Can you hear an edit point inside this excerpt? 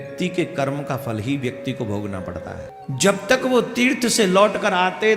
yes; 1 cut; at 2.7 s

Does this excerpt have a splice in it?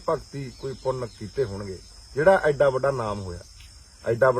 no; 0 cuts

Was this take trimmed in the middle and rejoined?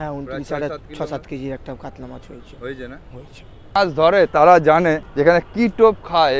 yes; 2 cuts; at 3.7 s, 5.1 s

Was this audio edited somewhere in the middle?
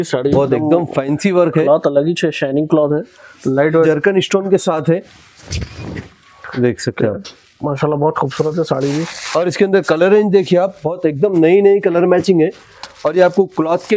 yes; 1 cut; at 3.7 s

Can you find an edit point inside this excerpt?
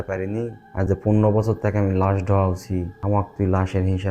yes; 1 cut; at 3.0 s

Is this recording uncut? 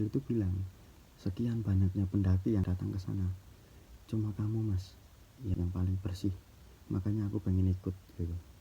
no; 2 cuts; at 2.6 s, 5.5 s

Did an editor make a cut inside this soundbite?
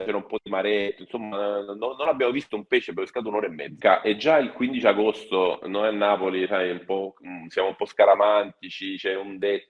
yes; 1 cut; at 3.7 s

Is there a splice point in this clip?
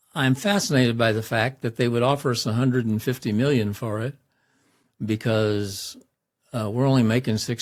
no; 0 cuts

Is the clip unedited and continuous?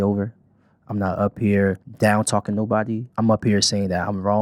no; 2 cuts; at 1.9 s, 3.1 s

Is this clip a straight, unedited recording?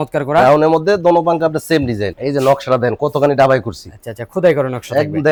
yes; 0 cuts

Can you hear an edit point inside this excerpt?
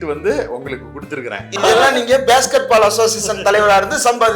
yes; 1 cut; at 1.6 s

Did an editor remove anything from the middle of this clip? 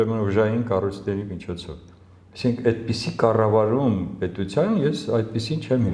no; 0 cuts

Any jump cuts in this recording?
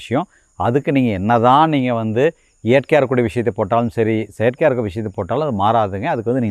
no; 0 cuts

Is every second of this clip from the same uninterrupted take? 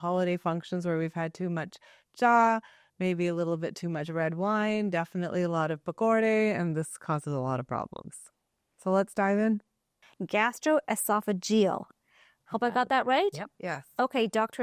yes; 0 cuts

